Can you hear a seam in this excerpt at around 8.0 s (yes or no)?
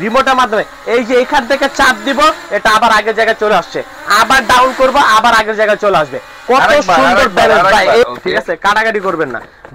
yes